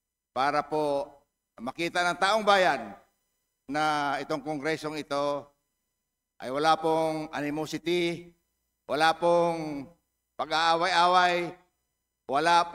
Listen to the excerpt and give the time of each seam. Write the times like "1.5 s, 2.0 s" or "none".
none